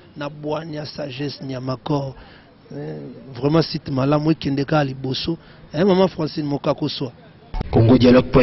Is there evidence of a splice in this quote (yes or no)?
yes